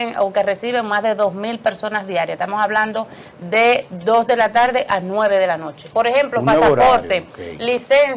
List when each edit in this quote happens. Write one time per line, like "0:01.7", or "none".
none